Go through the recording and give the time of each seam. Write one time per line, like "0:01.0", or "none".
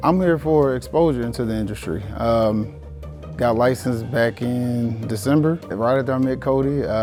none